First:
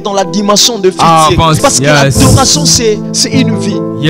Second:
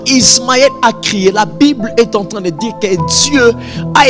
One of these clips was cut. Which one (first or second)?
first